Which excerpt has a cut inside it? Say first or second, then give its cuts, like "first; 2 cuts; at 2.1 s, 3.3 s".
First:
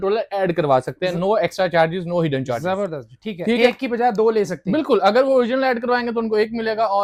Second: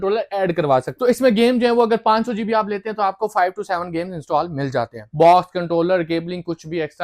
second; 2 cuts; at 0.9 s, 5.0 s